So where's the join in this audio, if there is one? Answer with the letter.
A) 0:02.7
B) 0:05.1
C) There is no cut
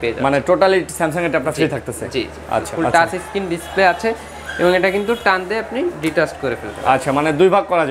A